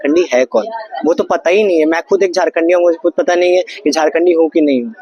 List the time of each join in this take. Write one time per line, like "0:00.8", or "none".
none